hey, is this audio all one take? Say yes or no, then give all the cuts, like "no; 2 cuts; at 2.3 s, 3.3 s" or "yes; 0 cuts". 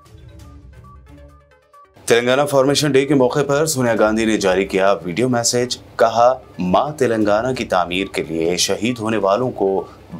no; 1 cut; at 0.9 s